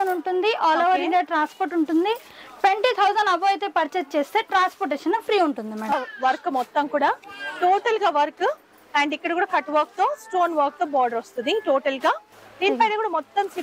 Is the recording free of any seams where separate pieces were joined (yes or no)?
no